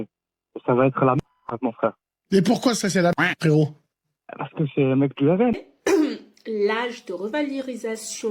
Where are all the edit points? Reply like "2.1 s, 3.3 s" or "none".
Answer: 5.7 s